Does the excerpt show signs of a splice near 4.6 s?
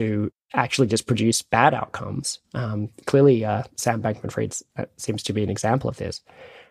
no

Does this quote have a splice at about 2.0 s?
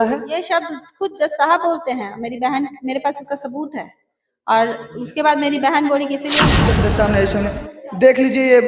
no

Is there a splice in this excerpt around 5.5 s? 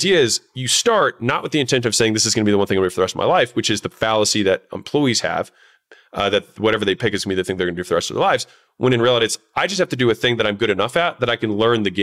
no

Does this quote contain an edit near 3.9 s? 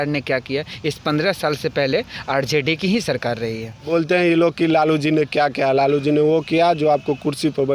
yes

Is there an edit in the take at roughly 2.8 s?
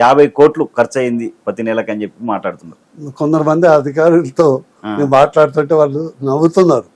no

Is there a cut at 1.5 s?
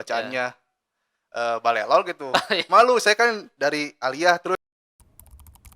no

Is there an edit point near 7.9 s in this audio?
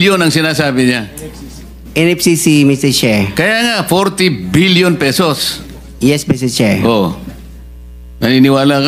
no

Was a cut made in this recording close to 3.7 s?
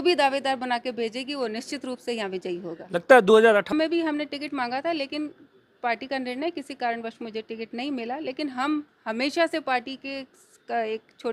yes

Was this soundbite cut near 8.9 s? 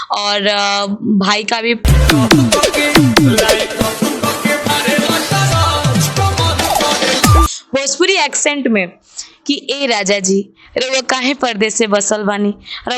no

